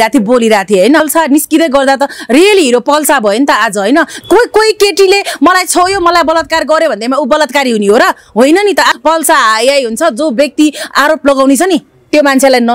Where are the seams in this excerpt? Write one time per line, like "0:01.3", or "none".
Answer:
0:01.0
0:04.2
0:08.9